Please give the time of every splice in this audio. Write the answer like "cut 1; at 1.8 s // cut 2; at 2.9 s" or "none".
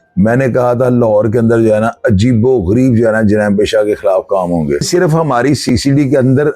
cut 1; at 4.9 s